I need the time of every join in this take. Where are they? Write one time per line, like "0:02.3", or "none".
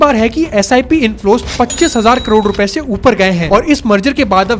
0:03.5

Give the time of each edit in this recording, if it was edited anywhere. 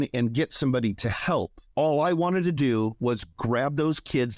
0:01.6

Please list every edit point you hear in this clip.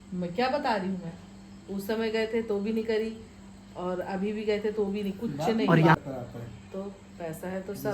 0:05.9

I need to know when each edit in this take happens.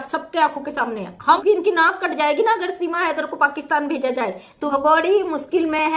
0:01.4
0:04.7

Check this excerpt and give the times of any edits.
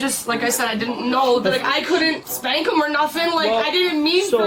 none

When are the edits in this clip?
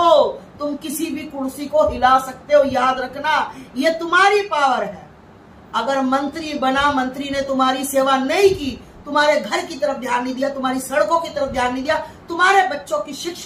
none

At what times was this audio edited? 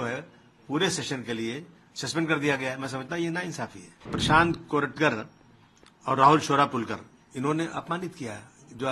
0:04.2

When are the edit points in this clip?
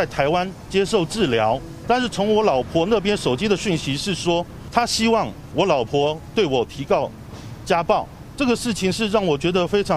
0:01.7
0:04.6
0:05.4
0:08.2

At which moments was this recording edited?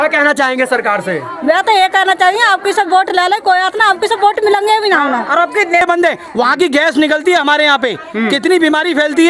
0:05.8

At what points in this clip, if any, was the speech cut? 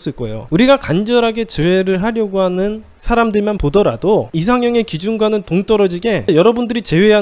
0:04.3
0:06.3

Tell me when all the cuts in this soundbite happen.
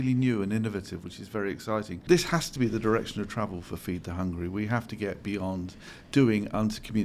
0:02.0

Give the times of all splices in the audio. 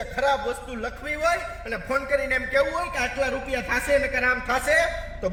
none

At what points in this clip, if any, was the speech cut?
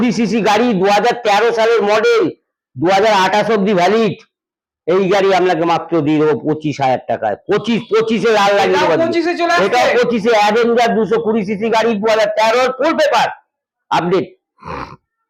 none

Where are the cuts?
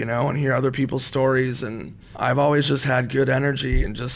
0:02.1

